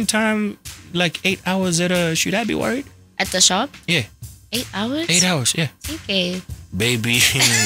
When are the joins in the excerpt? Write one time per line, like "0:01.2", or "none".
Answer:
none